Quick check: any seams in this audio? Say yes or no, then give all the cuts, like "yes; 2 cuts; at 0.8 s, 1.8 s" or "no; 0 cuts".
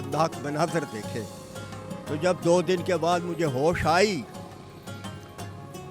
no; 0 cuts